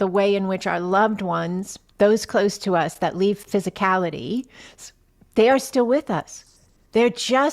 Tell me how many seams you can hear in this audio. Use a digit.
2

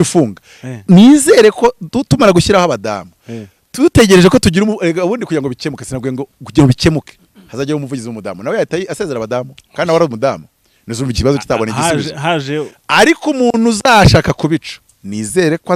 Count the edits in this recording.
0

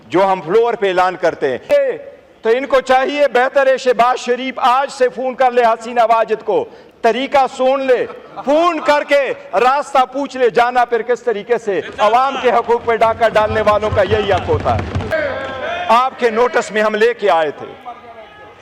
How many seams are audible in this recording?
2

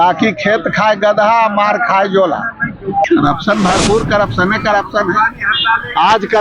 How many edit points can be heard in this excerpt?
1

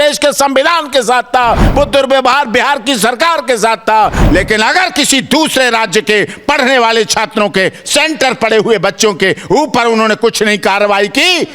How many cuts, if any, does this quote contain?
1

